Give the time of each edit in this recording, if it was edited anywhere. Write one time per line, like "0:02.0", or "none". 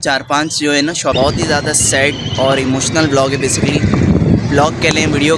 0:01.1